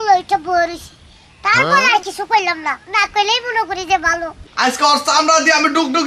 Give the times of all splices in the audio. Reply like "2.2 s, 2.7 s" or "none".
4.3 s